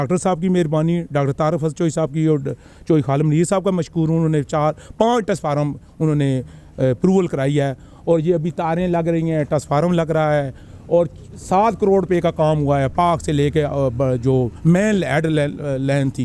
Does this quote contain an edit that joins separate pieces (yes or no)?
no